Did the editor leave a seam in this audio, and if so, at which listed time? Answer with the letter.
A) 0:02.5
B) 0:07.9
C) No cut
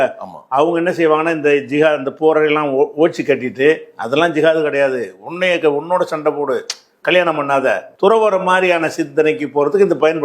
B